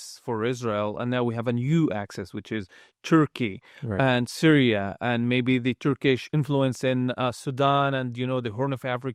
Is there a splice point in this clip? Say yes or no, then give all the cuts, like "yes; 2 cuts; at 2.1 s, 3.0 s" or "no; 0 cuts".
no; 0 cuts